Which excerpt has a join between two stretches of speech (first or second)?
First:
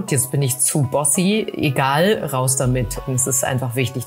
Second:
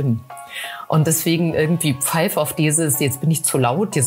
first